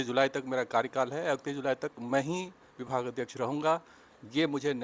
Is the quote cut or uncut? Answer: uncut